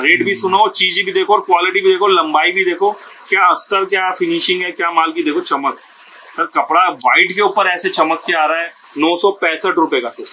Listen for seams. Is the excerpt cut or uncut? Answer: cut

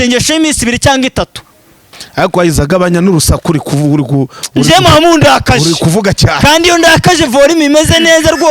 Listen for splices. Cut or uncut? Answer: cut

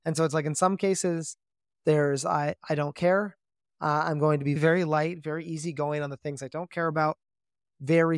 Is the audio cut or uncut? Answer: cut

